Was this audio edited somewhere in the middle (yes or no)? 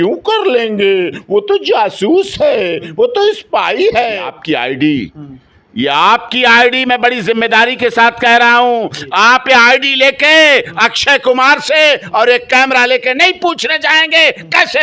yes